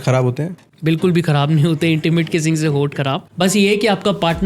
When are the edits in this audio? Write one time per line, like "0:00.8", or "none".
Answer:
0:03.3